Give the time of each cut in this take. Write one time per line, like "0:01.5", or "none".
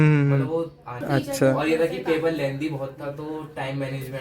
0:01.0